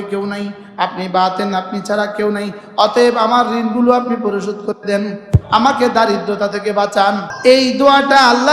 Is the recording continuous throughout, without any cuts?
no; 1 cut; at 7.3 s

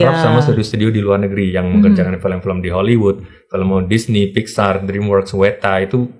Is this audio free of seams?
yes; 0 cuts

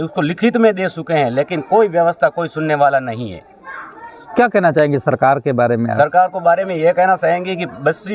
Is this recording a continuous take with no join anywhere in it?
yes; 0 cuts

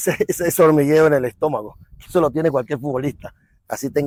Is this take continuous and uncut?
yes; 0 cuts

